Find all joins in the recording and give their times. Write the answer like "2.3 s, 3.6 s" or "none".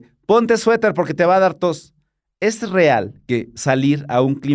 none